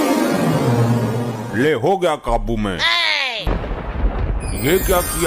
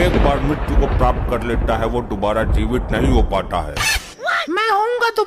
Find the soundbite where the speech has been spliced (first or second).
first